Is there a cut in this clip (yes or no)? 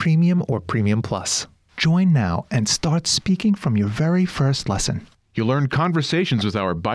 yes